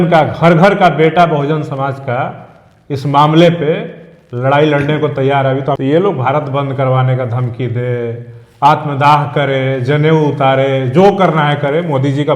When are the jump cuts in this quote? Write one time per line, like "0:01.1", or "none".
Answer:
0:05.8